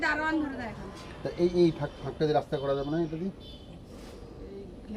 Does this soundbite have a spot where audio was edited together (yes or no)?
no